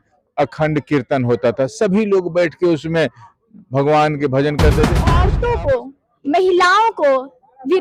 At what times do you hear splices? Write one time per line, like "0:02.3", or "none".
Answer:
0:05.1